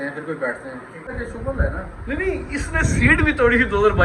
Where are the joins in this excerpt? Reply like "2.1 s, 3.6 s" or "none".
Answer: 1.1 s